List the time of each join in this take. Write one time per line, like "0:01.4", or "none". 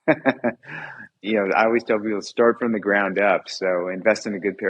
0:01.2